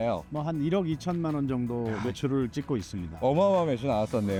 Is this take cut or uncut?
uncut